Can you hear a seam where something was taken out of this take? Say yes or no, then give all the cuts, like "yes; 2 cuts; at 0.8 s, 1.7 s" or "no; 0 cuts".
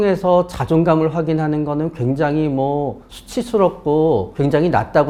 no; 0 cuts